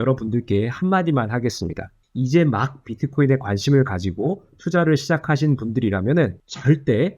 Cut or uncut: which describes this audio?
uncut